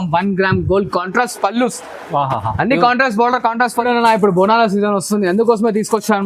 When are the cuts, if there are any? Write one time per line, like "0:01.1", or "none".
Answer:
0:03.8